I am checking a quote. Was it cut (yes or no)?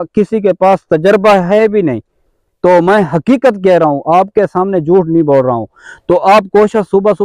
no